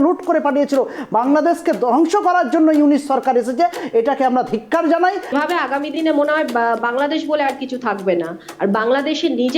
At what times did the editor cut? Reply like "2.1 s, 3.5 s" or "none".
5.3 s